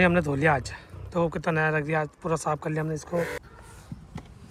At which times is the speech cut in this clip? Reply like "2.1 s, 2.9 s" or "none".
3.4 s